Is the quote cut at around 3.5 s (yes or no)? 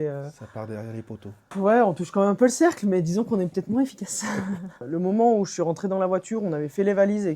no